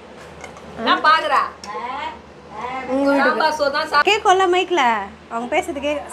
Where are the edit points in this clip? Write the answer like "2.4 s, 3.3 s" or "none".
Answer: 4.0 s